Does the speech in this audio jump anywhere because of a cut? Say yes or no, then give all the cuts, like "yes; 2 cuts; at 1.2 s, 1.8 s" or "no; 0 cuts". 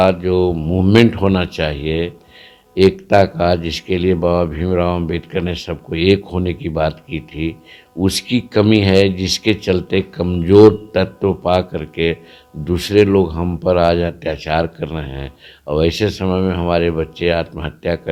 no; 0 cuts